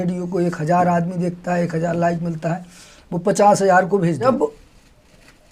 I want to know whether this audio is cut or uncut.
cut